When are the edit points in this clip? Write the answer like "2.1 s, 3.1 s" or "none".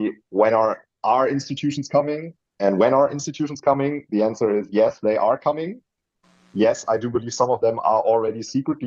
none